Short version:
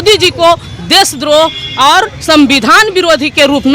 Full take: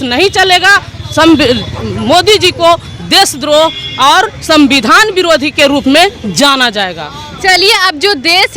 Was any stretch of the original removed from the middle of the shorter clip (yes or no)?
no